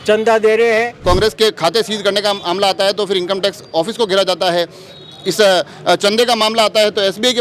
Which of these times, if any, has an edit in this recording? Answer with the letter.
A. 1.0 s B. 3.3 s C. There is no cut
A